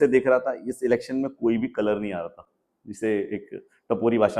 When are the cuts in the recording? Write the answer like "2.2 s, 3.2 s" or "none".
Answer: none